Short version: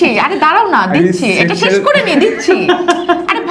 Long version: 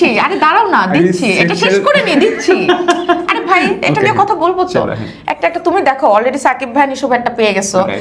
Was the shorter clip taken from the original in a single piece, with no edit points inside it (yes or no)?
yes